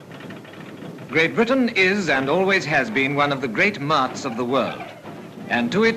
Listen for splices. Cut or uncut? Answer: cut